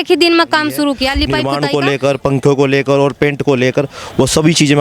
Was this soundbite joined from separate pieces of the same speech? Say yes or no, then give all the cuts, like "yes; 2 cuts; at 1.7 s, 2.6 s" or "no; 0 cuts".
yes; 1 cut; at 1.4 s